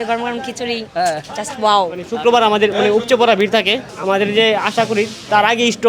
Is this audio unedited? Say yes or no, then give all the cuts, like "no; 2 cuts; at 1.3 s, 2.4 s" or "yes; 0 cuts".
no; 2 cuts; at 2.1 s, 3.8 s